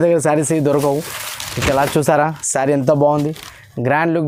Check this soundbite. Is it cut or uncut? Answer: uncut